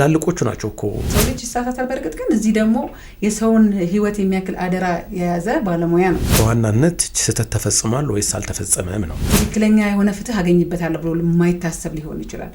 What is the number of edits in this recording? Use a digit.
3